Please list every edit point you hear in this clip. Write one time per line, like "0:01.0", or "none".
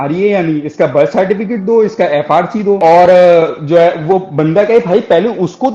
none